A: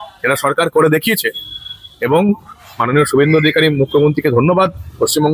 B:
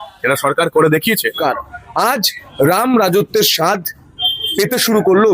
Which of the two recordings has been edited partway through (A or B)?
B